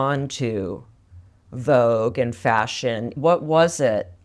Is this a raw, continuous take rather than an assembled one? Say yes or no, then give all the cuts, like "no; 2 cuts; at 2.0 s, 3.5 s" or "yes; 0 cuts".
no; 1 cut; at 3.1 s